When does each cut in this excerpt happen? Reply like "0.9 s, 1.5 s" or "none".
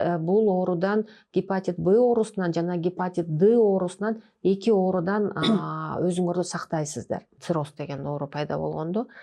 7.3 s